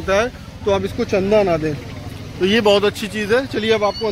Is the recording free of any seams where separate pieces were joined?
yes; 0 cuts

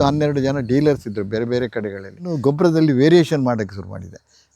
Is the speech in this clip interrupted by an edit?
yes; 1 cut; at 2.4 s

